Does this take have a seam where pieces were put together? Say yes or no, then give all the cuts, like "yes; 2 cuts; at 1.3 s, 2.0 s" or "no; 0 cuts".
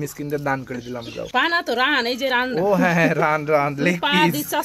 yes; 1 cut; at 1.3 s